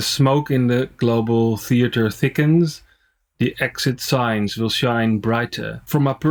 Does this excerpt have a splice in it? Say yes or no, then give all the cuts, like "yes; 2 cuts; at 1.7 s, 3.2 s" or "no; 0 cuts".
no; 0 cuts